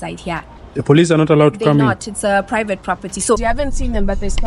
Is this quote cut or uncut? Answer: cut